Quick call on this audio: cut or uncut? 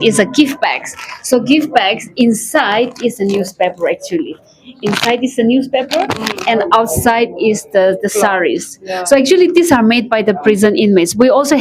uncut